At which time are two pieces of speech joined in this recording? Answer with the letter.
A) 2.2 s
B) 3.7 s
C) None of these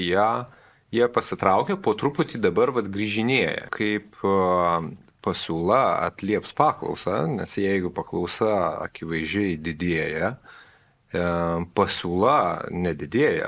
B